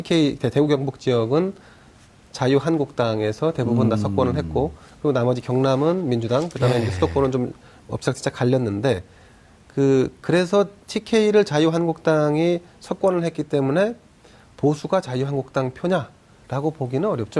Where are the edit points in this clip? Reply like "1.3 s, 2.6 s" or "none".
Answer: 10.4 s